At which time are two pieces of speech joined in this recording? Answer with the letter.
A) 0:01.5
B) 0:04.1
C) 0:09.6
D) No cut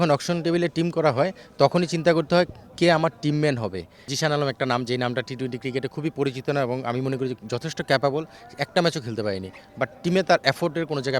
B